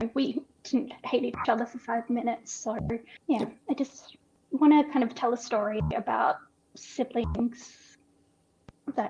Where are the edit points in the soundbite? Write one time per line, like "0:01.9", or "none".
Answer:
0:03.1